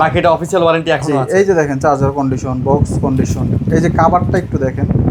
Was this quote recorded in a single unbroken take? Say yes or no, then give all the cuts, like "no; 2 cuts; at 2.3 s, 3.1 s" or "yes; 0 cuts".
yes; 0 cuts